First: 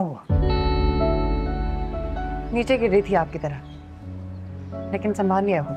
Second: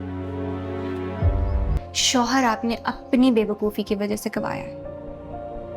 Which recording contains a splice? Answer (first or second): second